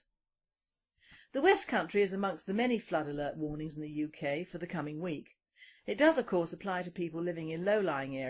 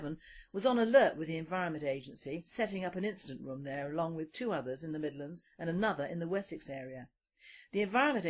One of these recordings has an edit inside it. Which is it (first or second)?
second